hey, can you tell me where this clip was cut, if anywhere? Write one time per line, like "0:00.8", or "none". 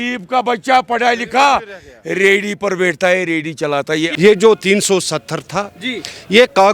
none